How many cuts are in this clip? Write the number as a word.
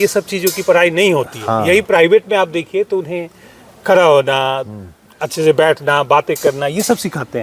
zero